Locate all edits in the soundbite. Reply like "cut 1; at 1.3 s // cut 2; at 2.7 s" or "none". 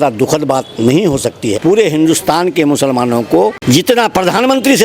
cut 1; at 1.4 s // cut 2; at 3.6 s